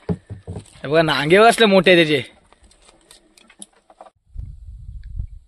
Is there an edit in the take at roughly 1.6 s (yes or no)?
no